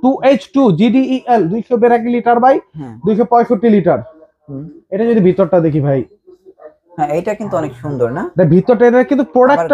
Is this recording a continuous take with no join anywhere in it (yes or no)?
yes